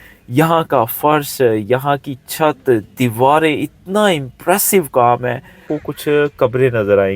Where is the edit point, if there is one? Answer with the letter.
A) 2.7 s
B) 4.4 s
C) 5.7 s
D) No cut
C